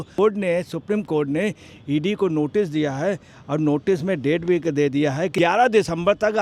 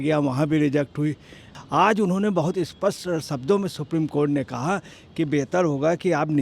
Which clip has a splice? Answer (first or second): second